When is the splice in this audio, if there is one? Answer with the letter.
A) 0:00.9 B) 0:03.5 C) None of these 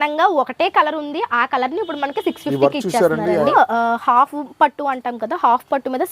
B